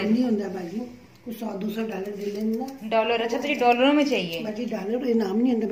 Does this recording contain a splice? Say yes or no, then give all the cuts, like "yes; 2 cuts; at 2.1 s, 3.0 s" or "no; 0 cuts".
no; 0 cuts